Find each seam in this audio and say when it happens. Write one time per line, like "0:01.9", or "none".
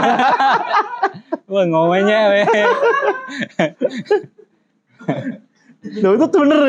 none